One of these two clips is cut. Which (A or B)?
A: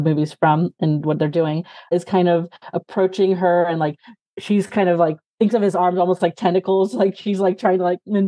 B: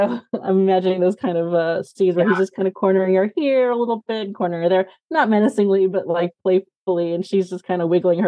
A